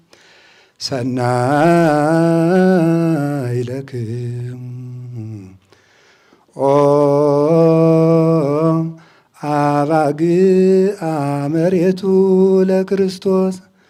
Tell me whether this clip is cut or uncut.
uncut